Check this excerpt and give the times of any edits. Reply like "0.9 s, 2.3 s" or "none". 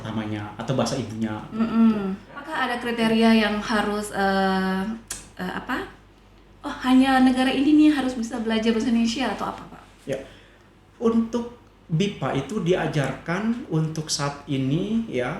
2.7 s